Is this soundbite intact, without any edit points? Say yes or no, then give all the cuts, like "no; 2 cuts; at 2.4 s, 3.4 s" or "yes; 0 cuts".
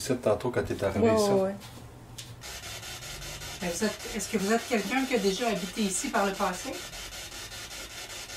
no; 1 cut; at 2.4 s